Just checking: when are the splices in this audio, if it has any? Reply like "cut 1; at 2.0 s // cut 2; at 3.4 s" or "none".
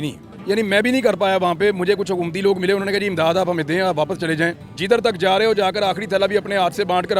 cut 1; at 4.7 s